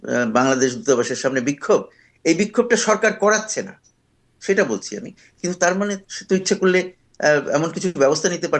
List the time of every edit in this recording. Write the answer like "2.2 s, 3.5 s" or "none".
none